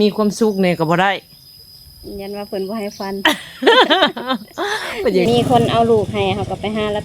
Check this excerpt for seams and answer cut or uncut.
cut